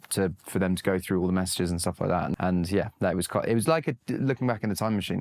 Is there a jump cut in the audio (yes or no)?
yes